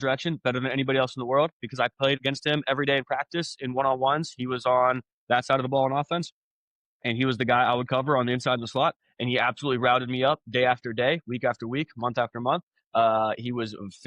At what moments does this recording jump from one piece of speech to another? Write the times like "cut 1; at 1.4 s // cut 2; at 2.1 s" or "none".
cut 1; at 2.2 s